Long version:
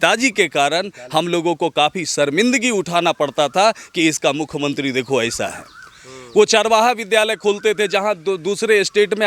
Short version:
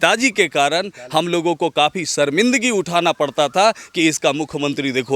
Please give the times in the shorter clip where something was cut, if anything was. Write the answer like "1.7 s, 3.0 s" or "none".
none